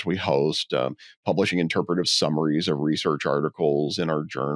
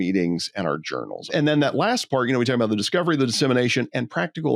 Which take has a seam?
second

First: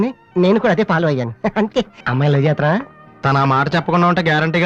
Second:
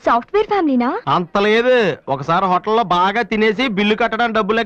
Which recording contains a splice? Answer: first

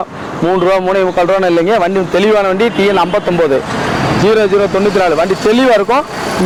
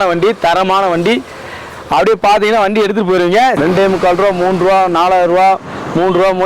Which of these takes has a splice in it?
second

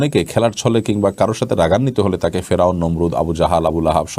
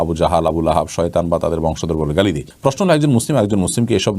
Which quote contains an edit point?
second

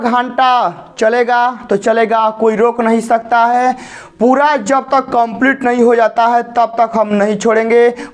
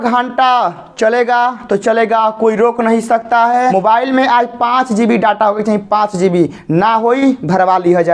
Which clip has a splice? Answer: second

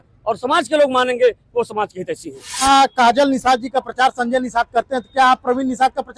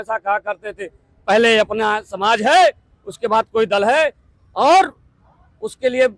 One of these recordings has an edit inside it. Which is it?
first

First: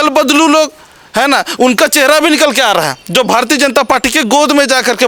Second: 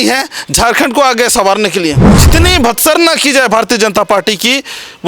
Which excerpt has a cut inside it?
second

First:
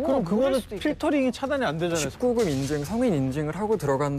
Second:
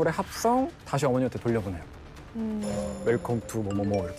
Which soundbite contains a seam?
first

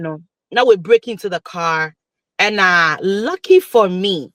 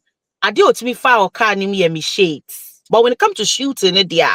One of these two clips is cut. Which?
second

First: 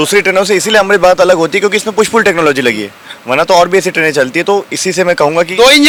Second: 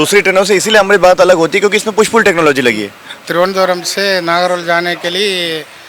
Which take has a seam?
second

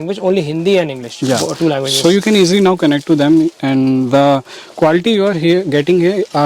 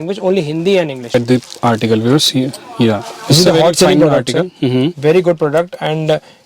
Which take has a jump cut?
second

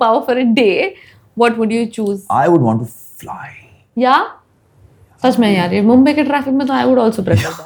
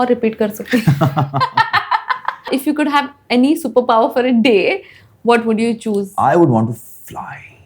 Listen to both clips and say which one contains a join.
second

